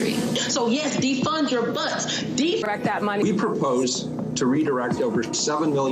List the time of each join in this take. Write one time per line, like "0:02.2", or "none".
0:02.7

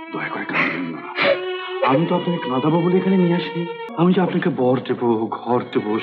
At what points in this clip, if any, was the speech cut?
0:03.8

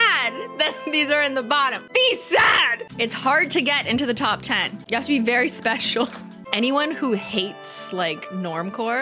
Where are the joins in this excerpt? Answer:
0:01.9
0:02.8
0:06.2

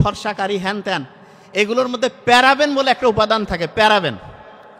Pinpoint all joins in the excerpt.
none

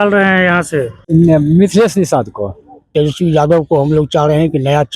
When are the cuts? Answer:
0:01.0
0:02.9

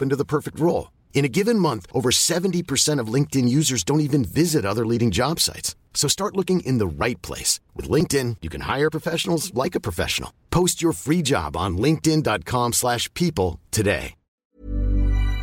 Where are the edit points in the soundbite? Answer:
0:14.4

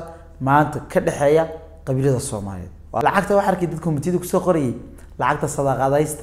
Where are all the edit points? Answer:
0:03.0

